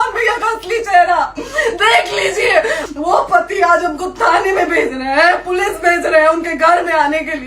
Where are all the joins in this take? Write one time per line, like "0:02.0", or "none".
0:02.8